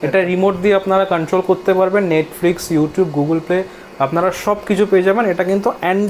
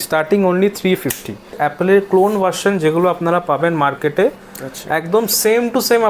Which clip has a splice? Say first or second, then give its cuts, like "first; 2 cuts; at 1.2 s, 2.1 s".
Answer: second; 1 cut; at 1.6 s